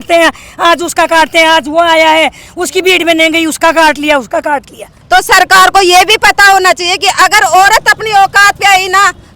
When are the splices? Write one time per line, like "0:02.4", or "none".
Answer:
0:05.0